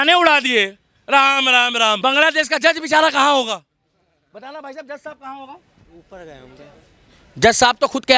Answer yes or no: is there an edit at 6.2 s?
no